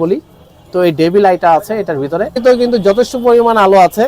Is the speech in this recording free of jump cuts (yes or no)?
no